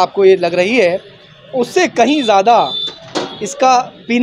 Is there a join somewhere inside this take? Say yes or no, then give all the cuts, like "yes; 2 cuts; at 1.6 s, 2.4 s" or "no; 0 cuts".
no; 0 cuts